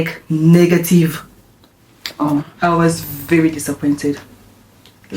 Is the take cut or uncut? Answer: cut